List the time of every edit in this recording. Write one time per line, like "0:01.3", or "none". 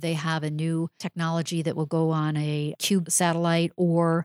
0:01.0
0:03.0